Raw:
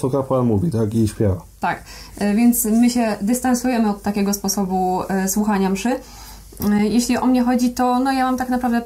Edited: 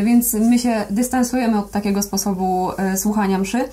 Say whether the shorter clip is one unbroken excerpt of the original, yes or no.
yes